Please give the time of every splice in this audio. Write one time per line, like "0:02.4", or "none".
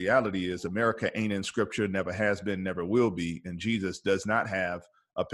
none